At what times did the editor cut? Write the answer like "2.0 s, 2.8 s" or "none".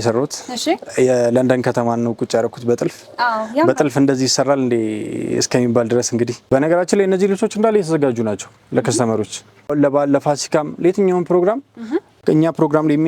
6.4 s, 9.7 s, 12.1 s